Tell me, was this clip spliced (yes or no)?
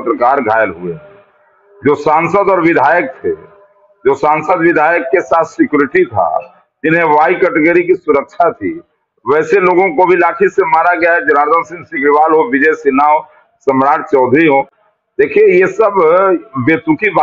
no